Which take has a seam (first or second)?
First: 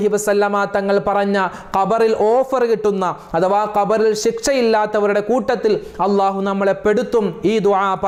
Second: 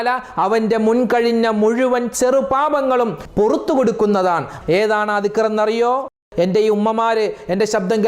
second